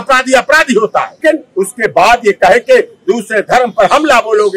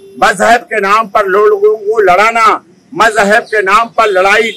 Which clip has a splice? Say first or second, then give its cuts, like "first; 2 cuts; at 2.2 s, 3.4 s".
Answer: first; 1 cut; at 1.2 s